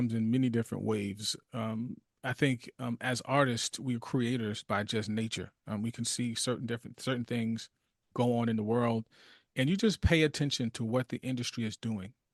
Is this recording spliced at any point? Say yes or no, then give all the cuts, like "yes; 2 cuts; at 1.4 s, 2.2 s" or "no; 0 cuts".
no; 0 cuts